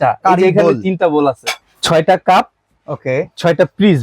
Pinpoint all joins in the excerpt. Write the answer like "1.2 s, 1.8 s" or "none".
1.7 s

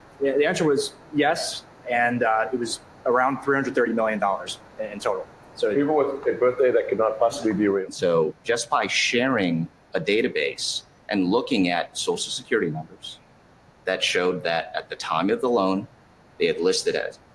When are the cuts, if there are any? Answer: 5.2 s, 7.8 s

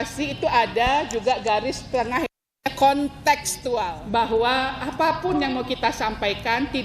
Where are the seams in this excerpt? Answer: 4.0 s

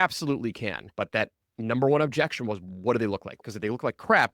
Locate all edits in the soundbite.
0.8 s, 3.3 s

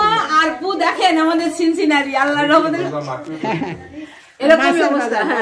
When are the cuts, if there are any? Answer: none

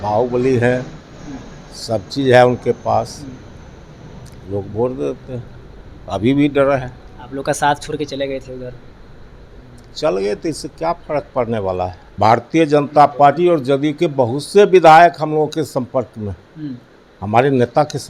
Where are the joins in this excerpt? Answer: 12.2 s

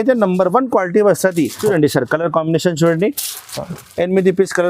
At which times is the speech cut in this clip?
1.6 s

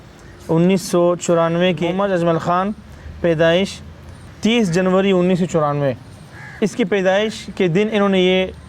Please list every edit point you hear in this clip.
1.9 s, 4.2 s

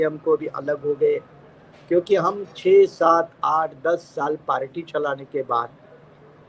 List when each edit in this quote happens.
none

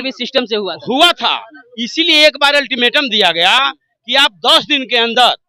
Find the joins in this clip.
none

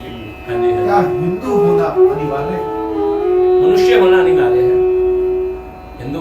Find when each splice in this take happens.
3.2 s

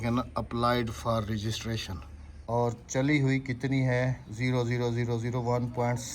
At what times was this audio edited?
2.3 s

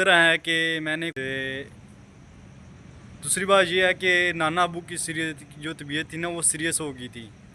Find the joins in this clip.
1.1 s

